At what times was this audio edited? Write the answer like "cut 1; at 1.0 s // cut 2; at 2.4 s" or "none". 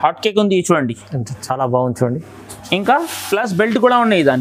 none